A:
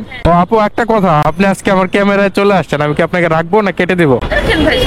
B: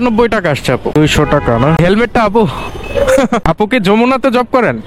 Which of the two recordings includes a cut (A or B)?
A